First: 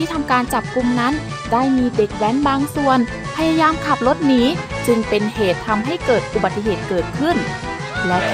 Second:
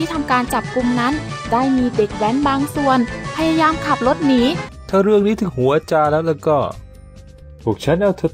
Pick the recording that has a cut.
second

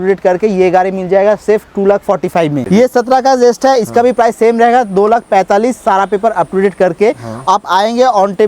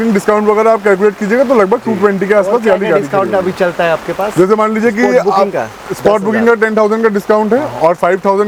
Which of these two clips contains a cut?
first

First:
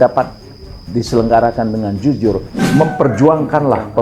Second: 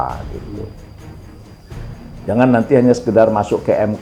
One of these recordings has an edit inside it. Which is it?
first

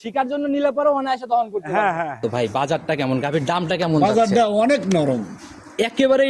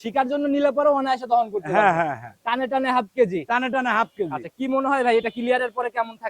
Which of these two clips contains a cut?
first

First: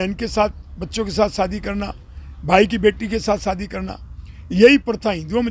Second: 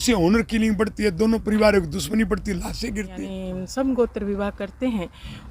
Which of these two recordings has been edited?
second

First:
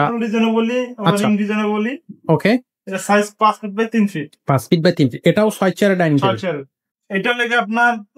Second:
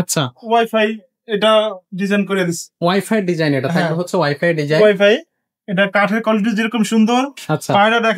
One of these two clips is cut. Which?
first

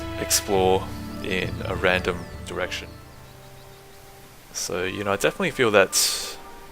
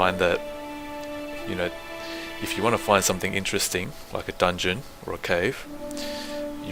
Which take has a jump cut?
first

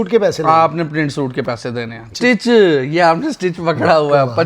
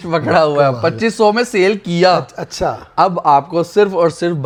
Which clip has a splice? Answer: first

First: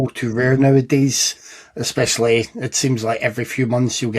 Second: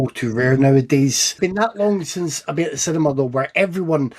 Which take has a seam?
second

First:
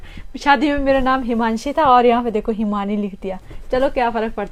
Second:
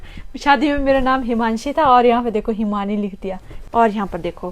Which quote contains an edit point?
second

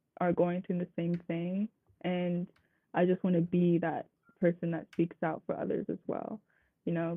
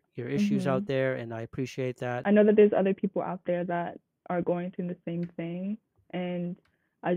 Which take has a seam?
second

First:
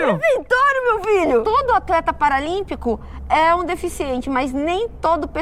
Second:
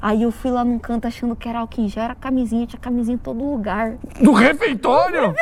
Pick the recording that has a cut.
first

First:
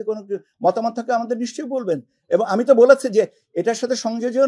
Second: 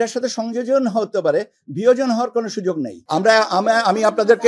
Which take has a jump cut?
second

